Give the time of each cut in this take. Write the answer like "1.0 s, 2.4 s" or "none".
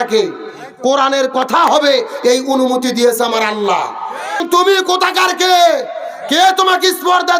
4.4 s